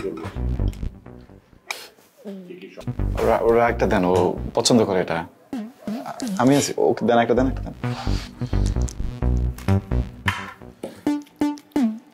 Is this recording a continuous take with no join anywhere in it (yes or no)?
no